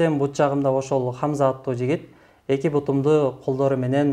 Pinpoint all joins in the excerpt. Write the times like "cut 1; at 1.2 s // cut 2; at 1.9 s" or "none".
none